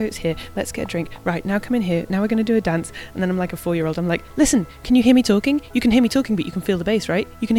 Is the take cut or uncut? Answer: uncut